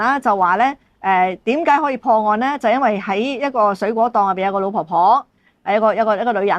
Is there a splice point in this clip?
no; 0 cuts

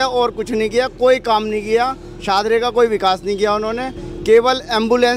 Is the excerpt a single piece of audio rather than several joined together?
yes; 0 cuts

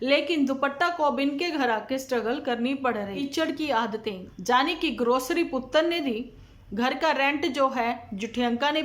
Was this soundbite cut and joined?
yes; 2 cuts; at 3.2 s, 4.3 s

